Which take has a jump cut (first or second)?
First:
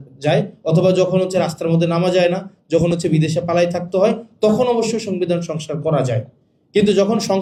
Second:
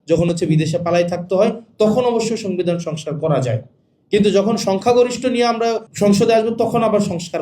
second